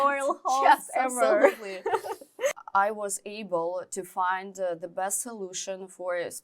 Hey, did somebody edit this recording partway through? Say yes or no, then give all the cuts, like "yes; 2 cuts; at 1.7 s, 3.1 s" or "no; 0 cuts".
yes; 1 cut; at 2.5 s